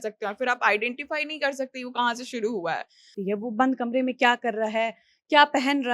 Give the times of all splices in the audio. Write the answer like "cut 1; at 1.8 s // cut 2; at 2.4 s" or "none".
cut 1; at 3.2 s